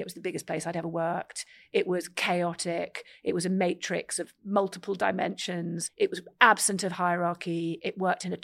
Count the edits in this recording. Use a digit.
2